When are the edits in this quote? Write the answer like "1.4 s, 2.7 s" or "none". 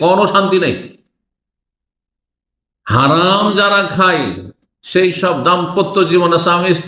none